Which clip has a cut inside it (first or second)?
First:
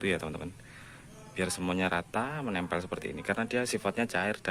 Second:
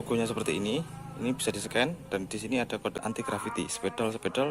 second